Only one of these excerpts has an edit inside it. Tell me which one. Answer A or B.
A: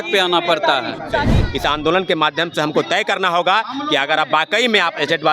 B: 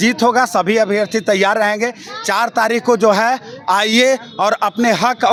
A